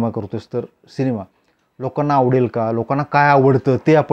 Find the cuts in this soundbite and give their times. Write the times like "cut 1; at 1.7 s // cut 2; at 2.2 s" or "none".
none